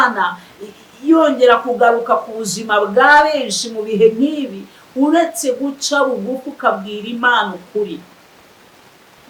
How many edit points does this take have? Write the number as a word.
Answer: zero